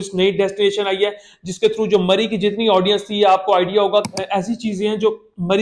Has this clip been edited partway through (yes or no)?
yes